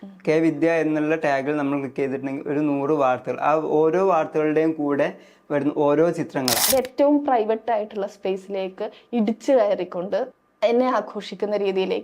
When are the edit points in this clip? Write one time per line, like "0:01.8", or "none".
0:06.6
0:10.4